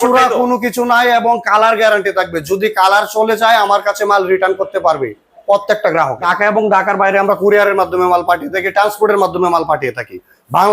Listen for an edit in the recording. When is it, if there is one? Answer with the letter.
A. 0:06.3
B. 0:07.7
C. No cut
A